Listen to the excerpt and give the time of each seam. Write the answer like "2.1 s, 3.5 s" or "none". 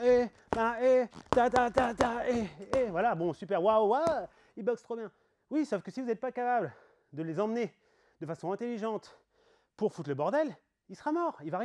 none